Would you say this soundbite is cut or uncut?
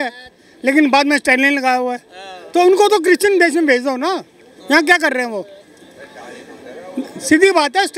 uncut